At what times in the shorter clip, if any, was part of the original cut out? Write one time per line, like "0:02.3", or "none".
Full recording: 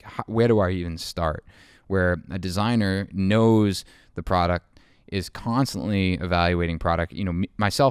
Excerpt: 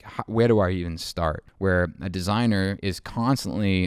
0:01.5
0:02.8